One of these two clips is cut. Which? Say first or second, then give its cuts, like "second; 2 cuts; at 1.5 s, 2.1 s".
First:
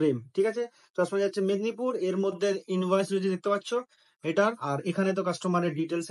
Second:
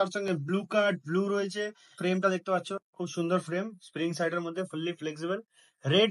second; 2 cuts; at 2.0 s, 2.8 s